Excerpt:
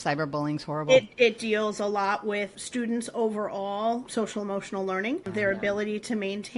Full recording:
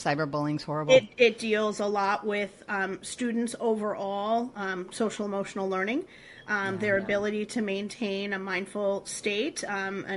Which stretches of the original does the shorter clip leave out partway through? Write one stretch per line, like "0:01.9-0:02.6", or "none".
0:02.6-0:03.1
0:04.5-0:04.9
0:06.1-0:06.7